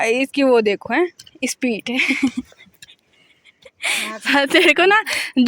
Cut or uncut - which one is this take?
uncut